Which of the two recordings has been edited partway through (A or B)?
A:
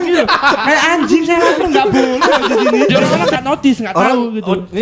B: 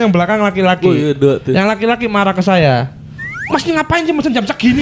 A